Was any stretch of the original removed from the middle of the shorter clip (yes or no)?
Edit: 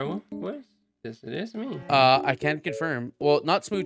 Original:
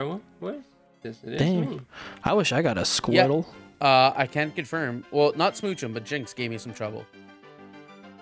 yes